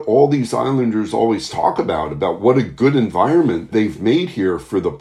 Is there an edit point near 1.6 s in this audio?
no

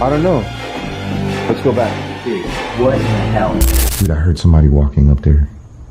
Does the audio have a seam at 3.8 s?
yes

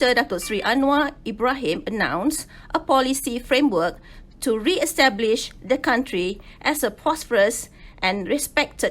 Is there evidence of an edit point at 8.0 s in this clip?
no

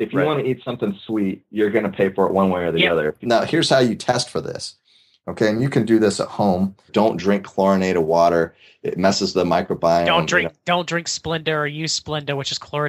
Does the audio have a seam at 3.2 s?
yes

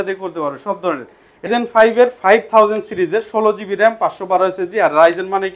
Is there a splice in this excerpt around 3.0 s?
no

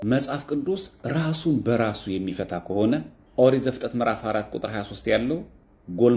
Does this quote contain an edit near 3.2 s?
yes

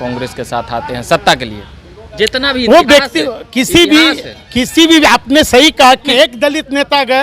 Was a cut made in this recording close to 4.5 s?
no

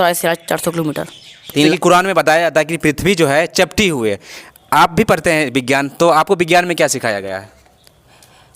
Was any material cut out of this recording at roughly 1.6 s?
yes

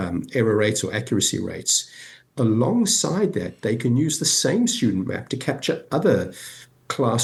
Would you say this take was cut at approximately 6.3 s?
no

